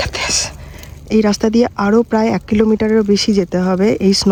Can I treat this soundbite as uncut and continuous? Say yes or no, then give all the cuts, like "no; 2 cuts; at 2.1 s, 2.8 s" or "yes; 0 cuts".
yes; 0 cuts